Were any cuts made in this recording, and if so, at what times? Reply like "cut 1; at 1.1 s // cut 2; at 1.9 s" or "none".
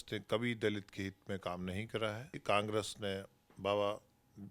cut 1; at 2.4 s

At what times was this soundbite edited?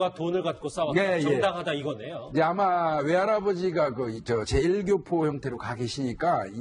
none

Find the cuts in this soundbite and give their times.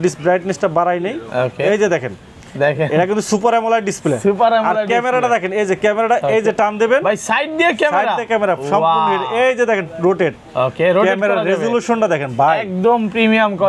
none

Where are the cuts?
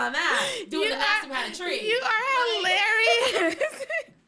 none

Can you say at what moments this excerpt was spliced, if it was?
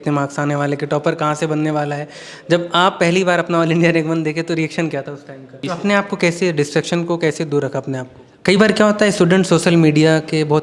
cut 1; at 5.6 s // cut 2; at 8.3 s

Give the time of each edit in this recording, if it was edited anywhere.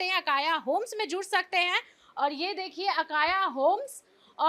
none

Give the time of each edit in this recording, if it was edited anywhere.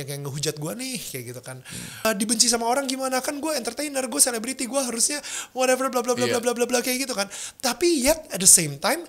cut 1; at 2.0 s

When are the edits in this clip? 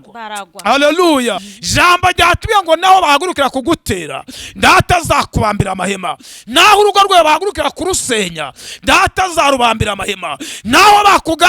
cut 1; at 1.5 s

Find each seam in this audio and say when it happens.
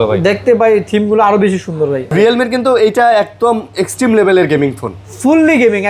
cut 1; at 2.1 s

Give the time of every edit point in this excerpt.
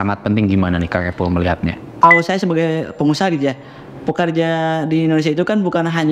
cut 1; at 2.0 s

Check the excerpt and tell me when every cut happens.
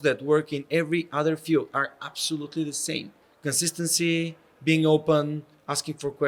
none

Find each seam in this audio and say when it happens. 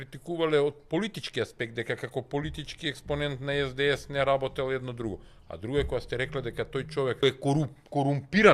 cut 1; at 7.2 s

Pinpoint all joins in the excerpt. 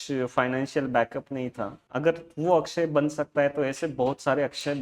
cut 1; at 1.8 s

